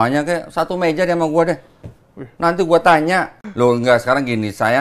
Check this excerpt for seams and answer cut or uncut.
cut